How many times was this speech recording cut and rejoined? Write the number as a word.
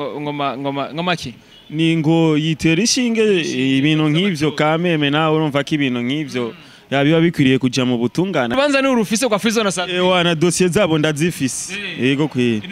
one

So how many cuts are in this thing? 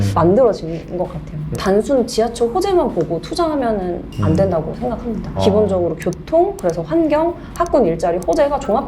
one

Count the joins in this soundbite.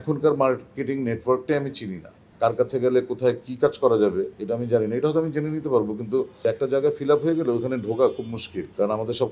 zero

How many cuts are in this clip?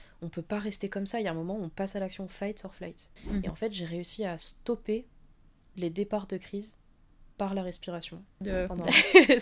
two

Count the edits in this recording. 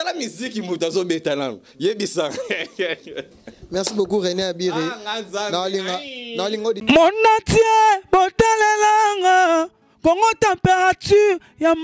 one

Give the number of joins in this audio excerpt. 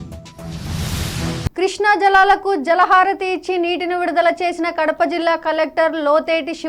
one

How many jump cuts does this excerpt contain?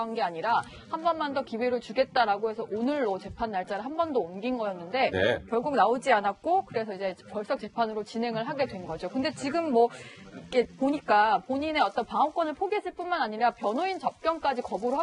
one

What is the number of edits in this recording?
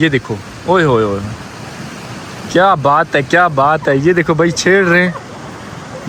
zero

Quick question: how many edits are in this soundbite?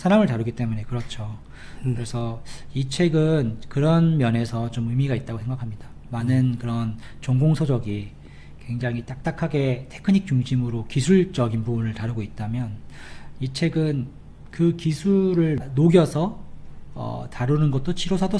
one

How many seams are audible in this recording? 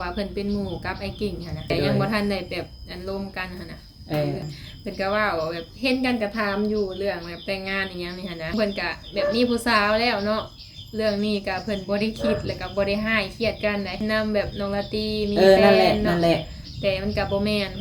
four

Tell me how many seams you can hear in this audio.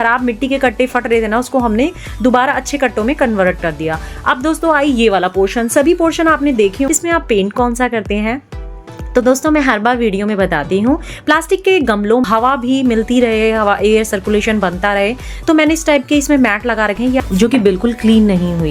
three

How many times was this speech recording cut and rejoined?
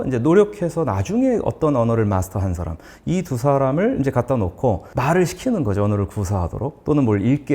one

